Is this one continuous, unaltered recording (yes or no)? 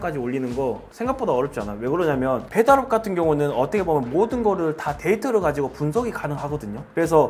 yes